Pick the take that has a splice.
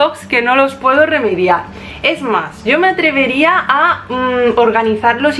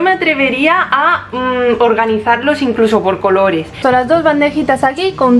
second; 1 cut; at 3.7 s

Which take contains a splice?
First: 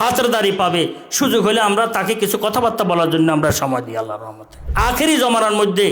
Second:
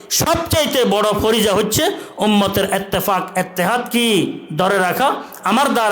first; 1 cut; at 4.7 s

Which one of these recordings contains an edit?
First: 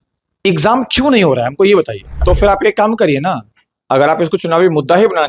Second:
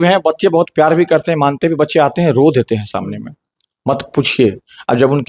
first; 1 cut; at 2.1 s

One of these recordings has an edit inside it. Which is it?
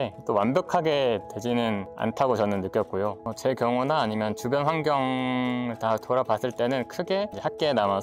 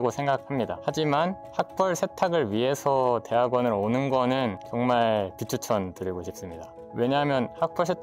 first; 1 cut; at 3.2 s

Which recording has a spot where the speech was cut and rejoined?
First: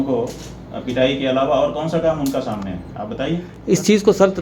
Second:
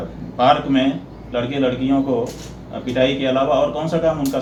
first; 1 cut; at 3.5 s

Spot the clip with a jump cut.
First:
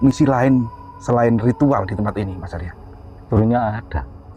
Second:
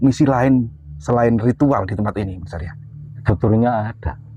first; 1 cut; at 3.2 s

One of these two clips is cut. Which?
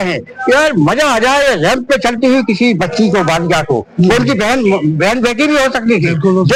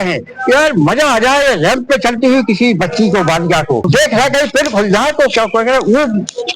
second; 1 cut; at 3.9 s

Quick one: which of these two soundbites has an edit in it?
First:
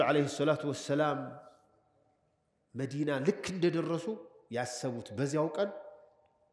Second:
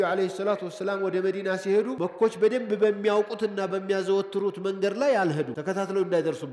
second; 2 cuts; at 1.9 s, 5.5 s

